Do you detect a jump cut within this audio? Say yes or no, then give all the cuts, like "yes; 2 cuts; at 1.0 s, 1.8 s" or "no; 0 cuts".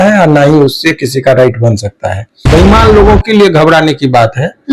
yes; 1 cut; at 2.5 s